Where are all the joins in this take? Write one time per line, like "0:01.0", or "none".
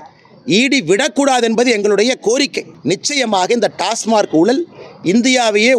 0:02.7